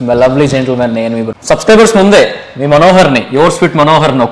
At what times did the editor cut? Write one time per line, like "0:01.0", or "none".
0:01.3